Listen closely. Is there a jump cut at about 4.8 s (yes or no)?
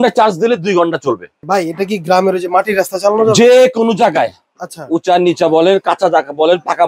no